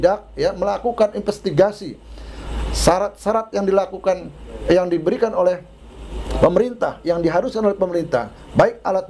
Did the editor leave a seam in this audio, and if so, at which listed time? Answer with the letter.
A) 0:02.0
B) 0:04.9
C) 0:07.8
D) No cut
D